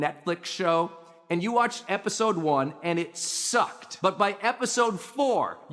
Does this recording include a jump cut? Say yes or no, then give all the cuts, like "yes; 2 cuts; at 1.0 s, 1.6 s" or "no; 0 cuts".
yes; 1 cut; at 3.8 s